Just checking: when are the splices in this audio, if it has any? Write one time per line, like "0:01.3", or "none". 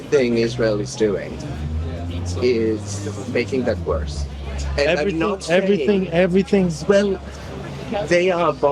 none